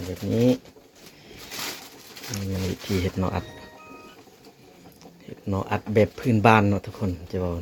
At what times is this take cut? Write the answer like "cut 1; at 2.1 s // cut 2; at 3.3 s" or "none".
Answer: none